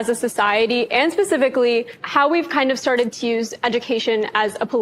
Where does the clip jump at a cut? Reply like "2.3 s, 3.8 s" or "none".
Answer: none

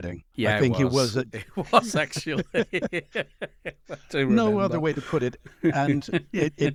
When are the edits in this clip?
none

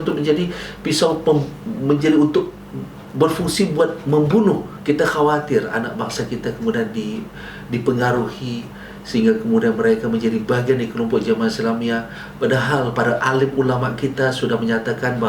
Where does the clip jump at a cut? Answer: 4.7 s

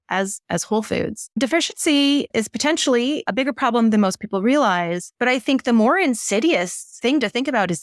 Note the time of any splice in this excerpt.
1.4 s, 2.3 s, 3.3 s, 5.0 s, 6.8 s

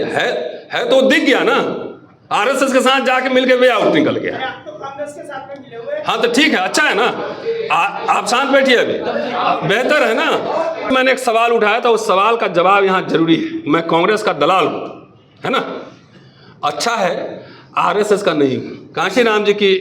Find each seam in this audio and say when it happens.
10.9 s, 18.8 s

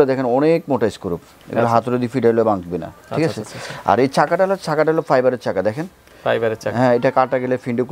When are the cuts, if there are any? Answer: none

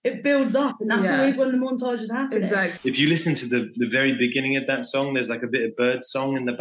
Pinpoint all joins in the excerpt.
2.7 s

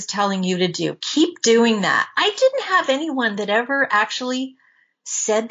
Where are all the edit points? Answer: none

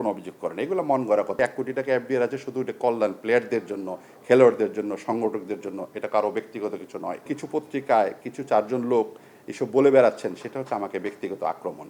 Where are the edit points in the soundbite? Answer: 1.4 s, 7.2 s

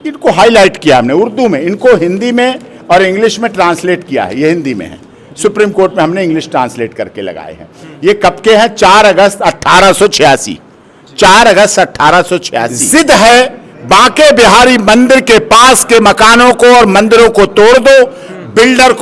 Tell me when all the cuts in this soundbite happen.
12.8 s

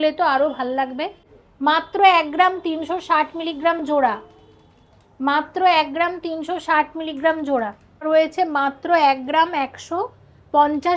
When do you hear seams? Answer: 1.3 s, 8.1 s

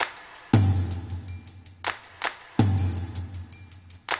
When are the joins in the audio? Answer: 2.0 s

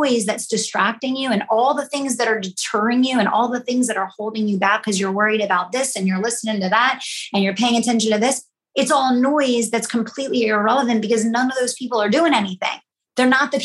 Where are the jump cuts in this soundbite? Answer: none

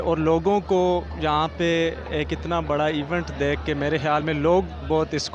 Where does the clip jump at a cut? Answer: none

